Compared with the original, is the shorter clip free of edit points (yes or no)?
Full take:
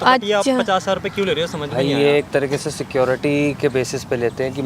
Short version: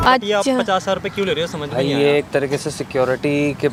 yes